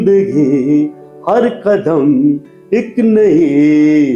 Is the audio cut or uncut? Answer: uncut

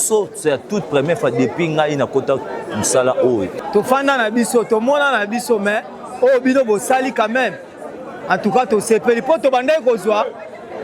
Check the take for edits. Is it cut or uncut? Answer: cut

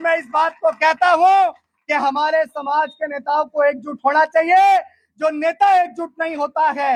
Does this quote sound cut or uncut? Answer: uncut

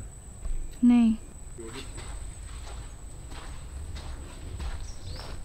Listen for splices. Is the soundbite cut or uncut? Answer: uncut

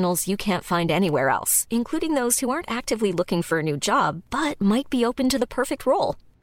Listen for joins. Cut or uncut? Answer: uncut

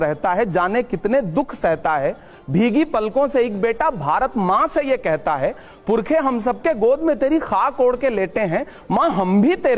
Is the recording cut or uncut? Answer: uncut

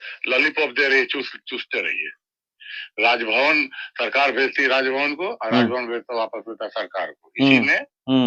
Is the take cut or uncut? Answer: uncut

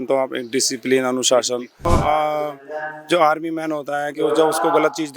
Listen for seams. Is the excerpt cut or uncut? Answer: cut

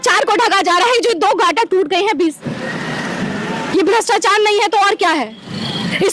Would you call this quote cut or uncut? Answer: cut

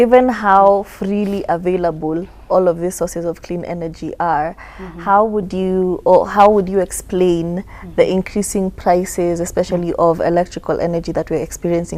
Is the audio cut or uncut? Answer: uncut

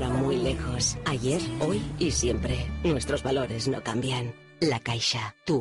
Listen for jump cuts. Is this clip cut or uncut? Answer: uncut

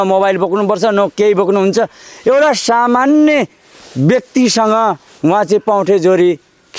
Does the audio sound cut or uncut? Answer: uncut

